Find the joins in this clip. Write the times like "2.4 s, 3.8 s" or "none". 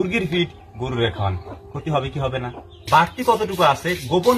2.7 s